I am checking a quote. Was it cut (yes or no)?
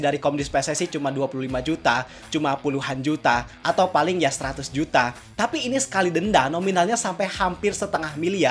no